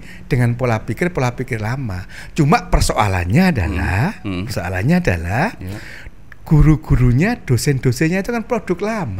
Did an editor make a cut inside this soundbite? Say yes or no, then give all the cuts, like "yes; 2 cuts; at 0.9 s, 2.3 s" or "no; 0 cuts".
no; 0 cuts